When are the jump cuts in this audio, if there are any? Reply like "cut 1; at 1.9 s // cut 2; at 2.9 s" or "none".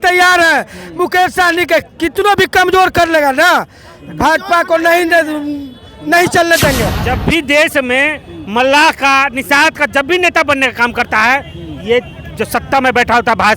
cut 1; at 7.0 s